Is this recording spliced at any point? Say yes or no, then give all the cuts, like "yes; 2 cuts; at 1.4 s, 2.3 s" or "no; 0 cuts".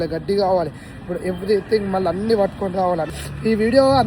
yes; 1 cut; at 3.1 s